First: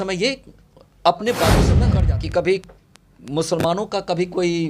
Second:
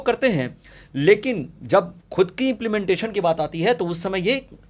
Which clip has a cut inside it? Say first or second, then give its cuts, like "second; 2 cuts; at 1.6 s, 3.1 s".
first; 1 cut; at 1.8 s